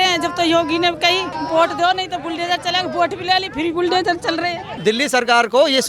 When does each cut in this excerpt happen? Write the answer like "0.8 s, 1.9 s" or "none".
1.3 s, 4.7 s